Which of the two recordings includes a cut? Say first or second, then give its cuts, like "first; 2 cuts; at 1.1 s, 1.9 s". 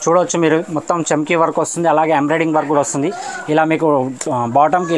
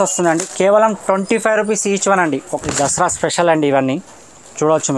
second; 1 cut; at 2.5 s